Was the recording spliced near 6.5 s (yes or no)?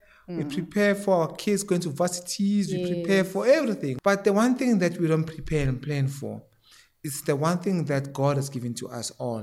no